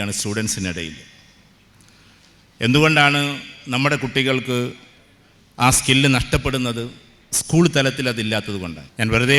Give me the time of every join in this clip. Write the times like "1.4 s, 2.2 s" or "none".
none